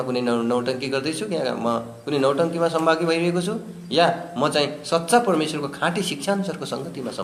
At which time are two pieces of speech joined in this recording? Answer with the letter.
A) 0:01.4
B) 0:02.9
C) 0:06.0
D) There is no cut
D